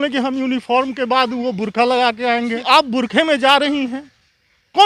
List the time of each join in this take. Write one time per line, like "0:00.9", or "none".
0:02.6